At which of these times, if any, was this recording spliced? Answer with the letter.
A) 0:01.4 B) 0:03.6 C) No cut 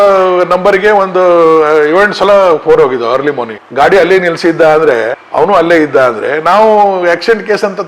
B